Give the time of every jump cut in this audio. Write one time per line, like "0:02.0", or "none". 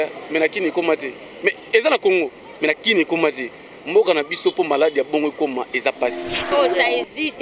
0:06.5